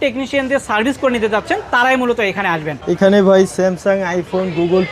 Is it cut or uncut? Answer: cut